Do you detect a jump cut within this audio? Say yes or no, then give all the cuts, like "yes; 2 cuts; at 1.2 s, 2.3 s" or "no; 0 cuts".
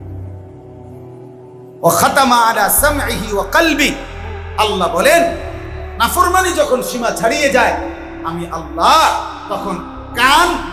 no; 0 cuts